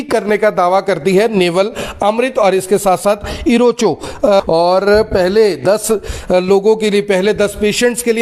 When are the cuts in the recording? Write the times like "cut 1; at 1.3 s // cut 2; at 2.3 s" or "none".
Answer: cut 1; at 4.4 s